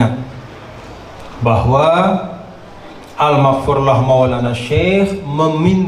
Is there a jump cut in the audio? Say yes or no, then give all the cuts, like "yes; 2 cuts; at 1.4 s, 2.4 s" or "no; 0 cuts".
no; 0 cuts